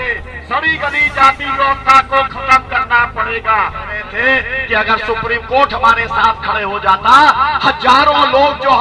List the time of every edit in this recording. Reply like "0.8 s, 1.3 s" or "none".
4.0 s

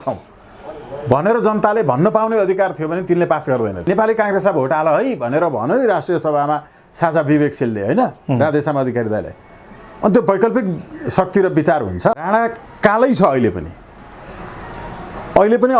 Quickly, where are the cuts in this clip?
3.9 s, 12.3 s

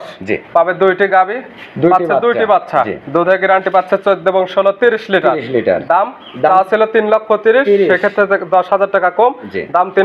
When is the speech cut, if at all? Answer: none

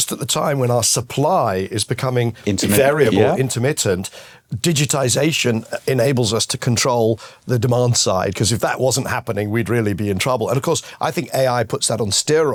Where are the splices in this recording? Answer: none

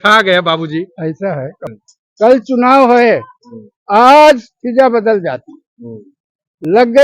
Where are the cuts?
1.6 s

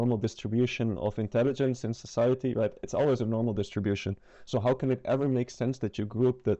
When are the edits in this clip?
none

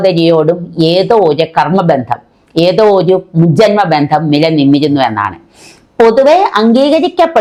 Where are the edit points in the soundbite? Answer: none

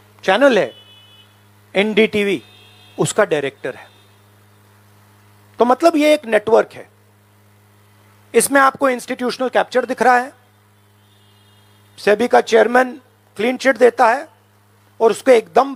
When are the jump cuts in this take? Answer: none

